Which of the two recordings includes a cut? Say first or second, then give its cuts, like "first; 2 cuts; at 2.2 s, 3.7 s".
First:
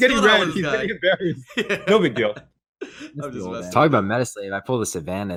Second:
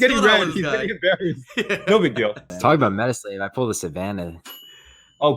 second; 1 cut; at 2.5 s